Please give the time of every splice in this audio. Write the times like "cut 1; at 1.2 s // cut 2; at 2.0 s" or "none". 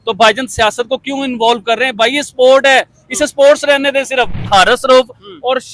cut 1; at 4.5 s